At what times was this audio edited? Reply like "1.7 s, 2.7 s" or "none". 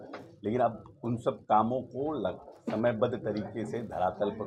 none